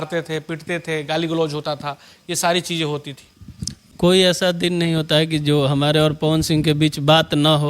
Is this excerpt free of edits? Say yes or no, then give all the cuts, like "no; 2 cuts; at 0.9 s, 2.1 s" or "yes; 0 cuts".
no; 1 cut; at 3.8 s